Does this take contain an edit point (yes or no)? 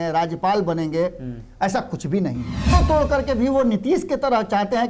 yes